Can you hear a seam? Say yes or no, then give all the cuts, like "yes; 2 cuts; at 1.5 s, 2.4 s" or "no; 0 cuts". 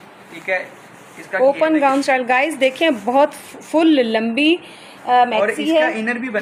no; 0 cuts